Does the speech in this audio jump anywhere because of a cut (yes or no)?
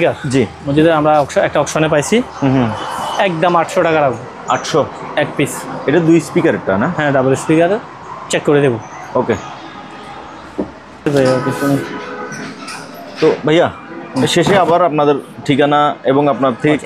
no